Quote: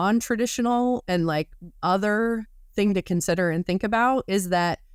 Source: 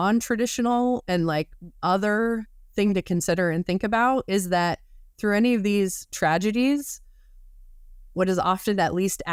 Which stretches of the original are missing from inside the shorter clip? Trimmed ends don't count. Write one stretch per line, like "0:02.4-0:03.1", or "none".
none

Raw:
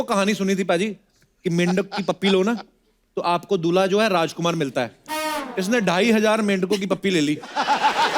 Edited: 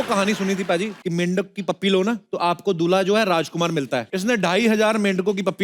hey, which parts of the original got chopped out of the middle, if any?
0:01.0-0:01.4
0:02.7-0:03.1
0:04.9-0:05.5

